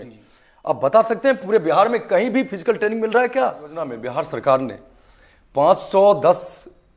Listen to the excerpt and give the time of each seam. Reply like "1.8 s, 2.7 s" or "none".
4.0 s